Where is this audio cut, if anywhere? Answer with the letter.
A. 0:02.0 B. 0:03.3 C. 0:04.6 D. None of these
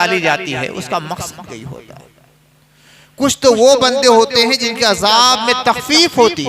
D